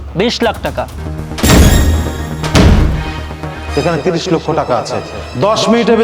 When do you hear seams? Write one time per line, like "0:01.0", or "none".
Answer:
0:01.0
0:03.6

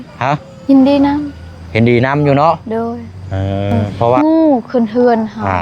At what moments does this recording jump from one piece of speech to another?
0:04.2

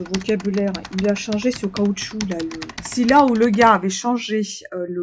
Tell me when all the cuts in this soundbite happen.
0:02.7

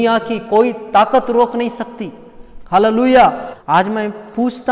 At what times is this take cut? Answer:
0:03.4

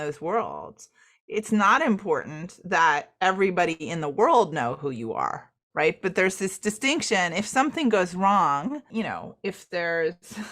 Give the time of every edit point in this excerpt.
0:08.8

